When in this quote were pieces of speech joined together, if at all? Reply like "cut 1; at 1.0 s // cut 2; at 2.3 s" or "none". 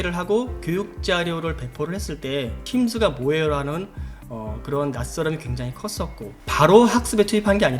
cut 1; at 2.6 s // cut 2; at 6.5 s